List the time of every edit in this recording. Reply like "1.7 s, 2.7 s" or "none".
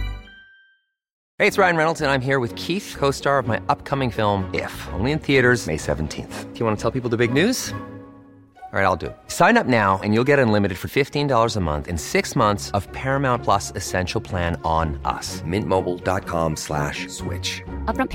1.2 s